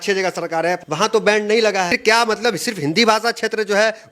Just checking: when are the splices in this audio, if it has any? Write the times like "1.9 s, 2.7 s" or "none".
0.8 s, 2.0 s